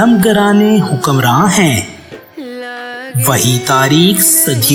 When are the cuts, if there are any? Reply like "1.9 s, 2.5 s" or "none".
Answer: none